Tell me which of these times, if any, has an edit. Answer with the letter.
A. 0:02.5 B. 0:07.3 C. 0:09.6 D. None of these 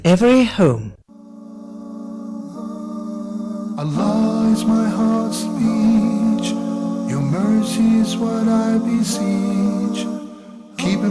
C